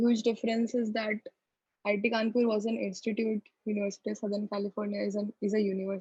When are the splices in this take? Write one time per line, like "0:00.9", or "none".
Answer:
none